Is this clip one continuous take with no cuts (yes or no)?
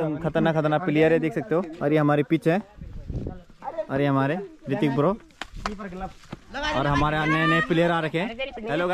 yes